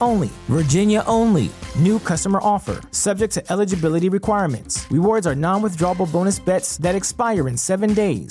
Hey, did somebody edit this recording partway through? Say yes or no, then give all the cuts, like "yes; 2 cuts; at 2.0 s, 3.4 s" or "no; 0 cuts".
no; 0 cuts